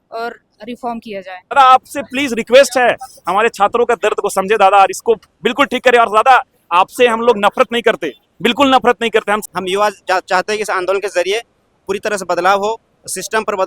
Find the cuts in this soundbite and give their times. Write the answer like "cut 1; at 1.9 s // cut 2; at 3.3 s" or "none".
cut 1; at 1.5 s // cut 2; at 9.4 s